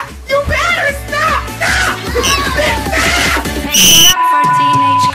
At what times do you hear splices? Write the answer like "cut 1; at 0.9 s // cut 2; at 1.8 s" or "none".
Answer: cut 1; at 4.1 s